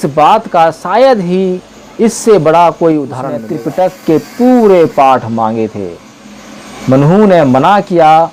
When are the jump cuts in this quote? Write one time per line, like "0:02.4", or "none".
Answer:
0:03.5